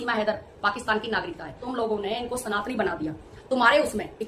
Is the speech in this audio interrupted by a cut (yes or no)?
yes